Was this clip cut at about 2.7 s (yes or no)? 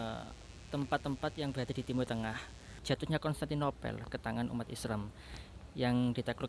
yes